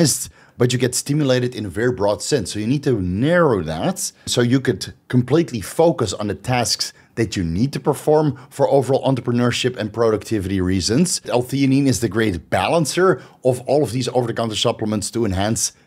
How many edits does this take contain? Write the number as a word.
two